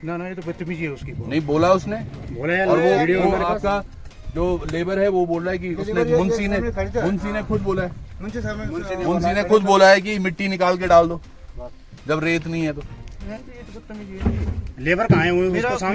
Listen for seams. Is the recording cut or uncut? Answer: uncut